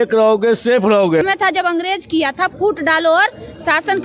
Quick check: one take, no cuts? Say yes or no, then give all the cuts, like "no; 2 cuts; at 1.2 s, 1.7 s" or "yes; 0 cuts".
no; 1 cut; at 1.2 s